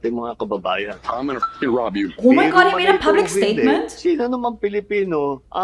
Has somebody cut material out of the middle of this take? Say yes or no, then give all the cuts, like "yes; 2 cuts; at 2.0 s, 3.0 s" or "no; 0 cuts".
no; 0 cuts